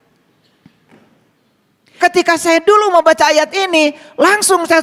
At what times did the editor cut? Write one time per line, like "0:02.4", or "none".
0:02.0